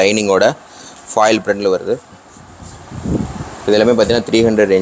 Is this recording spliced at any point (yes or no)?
no